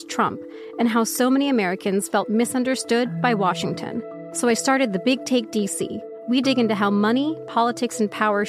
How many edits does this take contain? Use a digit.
2